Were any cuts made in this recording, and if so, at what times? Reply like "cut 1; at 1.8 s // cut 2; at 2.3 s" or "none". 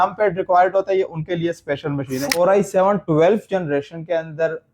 cut 1; at 2.2 s